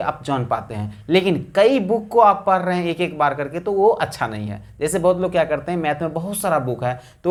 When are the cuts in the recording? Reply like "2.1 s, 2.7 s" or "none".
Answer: none